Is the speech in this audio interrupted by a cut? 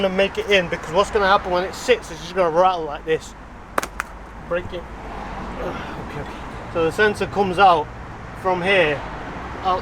yes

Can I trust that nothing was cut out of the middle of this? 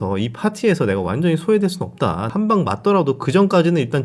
no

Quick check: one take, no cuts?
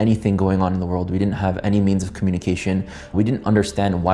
yes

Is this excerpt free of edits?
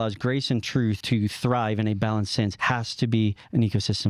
no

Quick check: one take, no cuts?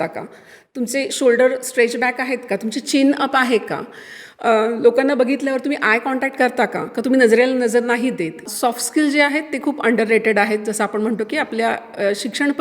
no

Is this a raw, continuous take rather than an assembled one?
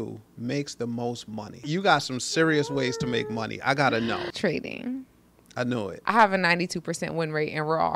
no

